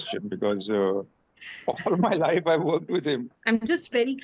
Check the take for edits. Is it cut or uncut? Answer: cut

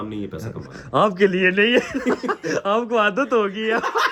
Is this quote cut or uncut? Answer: uncut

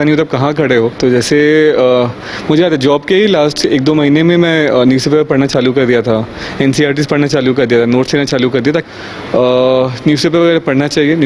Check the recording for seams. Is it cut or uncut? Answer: cut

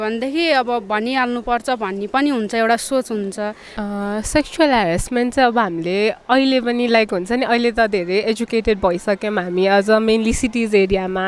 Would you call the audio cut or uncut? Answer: uncut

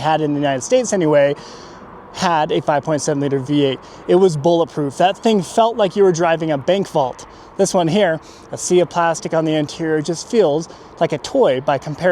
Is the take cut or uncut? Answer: uncut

